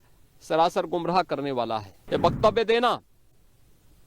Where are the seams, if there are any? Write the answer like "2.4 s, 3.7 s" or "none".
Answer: 1.9 s